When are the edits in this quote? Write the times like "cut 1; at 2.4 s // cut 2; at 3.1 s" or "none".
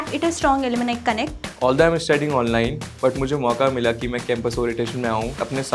cut 1; at 1.5 s